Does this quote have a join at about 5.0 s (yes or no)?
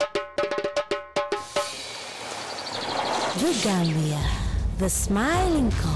no